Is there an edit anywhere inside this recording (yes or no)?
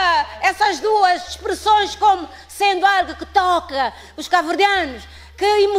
no